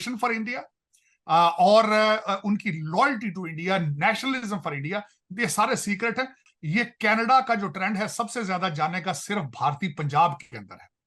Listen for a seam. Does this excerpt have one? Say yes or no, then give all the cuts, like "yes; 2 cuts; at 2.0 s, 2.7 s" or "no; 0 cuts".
yes; 1 cut; at 6.4 s